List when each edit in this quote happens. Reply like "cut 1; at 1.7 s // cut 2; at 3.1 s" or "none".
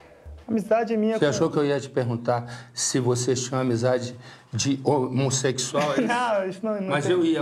none